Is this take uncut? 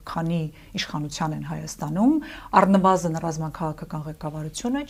yes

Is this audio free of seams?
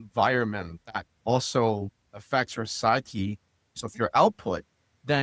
no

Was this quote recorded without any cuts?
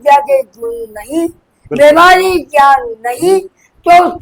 yes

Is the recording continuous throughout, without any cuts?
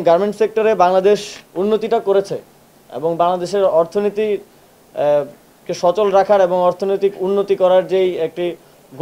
no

